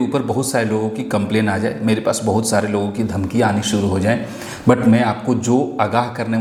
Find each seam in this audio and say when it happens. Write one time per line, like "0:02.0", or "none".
none